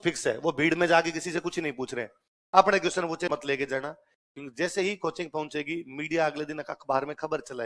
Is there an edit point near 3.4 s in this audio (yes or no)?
yes